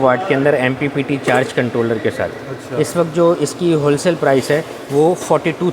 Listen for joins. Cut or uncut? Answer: uncut